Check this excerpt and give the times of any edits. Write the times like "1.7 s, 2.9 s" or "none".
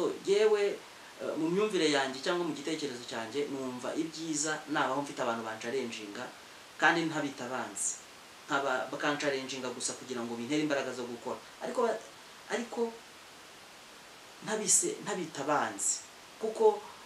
none